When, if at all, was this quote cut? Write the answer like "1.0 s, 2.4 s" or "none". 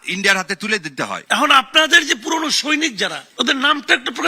1.2 s, 3.2 s